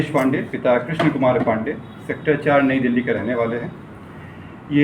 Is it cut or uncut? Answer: uncut